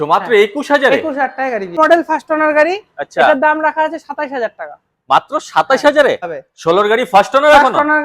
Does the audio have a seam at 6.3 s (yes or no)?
yes